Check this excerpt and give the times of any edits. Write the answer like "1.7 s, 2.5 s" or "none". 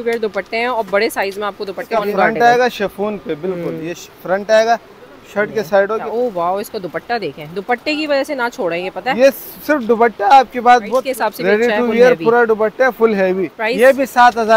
1.9 s, 6.0 s, 11.1 s, 13.6 s